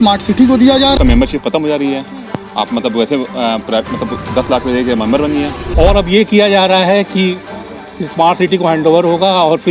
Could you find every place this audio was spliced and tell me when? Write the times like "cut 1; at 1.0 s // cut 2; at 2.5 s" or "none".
cut 1; at 1.0 s // cut 2; at 5.6 s

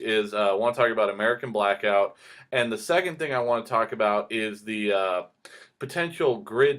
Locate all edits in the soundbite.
cut 1; at 3.2 s

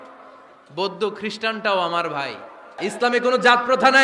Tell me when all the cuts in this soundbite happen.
cut 1; at 2.8 s

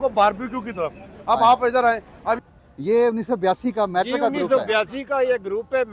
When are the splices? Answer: cut 1; at 2.4 s

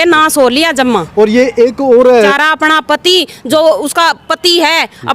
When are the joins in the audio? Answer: cut 1; at 2.3 s

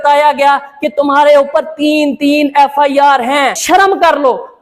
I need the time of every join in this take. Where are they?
cut 1; at 3.6 s

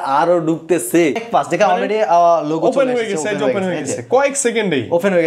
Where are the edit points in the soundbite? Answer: cut 1; at 1.2 s

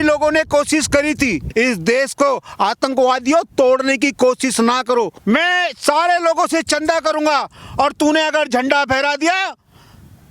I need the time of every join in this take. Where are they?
cut 1; at 1.5 s // cut 2; at 5.2 s

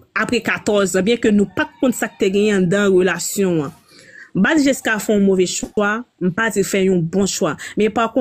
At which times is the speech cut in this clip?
none

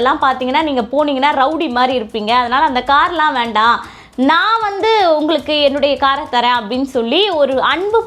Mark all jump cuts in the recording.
none

